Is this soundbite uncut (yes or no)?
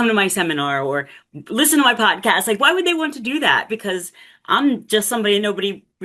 yes